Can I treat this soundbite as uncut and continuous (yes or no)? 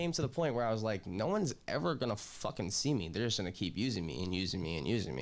yes